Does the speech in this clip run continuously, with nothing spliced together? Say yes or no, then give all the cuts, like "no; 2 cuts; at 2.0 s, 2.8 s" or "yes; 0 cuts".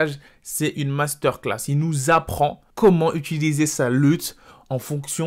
no; 1 cut; at 2.6 s